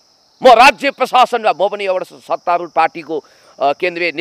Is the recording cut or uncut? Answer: uncut